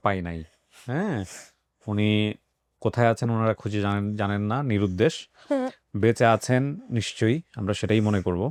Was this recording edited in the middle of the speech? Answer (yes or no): no